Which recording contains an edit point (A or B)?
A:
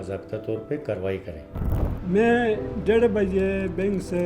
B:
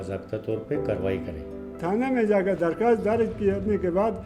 B